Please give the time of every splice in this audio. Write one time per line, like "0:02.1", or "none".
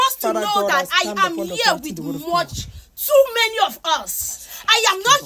none